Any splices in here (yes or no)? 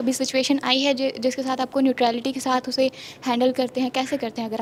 no